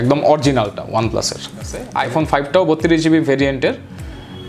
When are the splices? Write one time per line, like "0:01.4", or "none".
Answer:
0:01.8